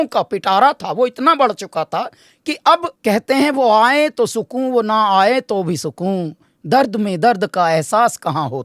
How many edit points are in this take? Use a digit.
1